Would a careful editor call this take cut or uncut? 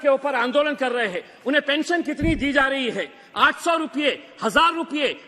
cut